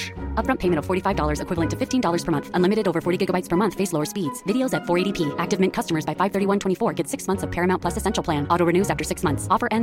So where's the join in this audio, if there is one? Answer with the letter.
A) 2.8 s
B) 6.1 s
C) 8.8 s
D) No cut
D